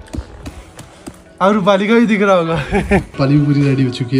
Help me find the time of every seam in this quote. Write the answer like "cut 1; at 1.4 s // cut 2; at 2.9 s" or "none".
cut 1; at 3.1 s